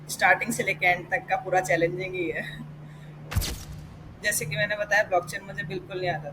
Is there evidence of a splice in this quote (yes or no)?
yes